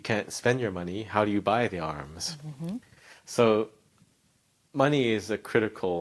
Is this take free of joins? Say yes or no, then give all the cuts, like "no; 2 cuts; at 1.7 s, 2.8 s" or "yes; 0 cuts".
yes; 0 cuts